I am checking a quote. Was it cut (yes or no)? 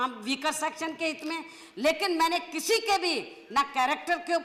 no